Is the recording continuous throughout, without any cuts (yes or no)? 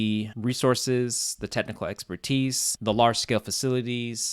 yes